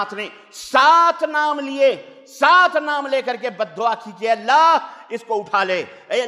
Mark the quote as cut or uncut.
uncut